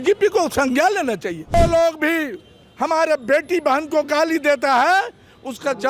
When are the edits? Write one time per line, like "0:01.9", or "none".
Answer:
0:01.5